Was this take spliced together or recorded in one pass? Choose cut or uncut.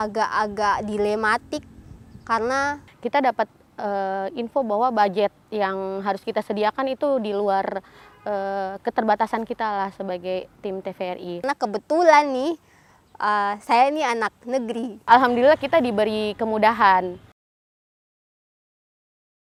uncut